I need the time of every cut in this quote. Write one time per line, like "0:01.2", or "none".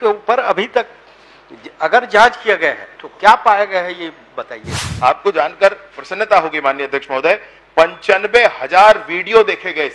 0:04.8